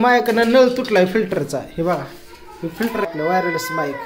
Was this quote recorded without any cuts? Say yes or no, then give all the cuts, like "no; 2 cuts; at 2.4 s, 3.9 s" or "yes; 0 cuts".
no; 1 cut; at 3.1 s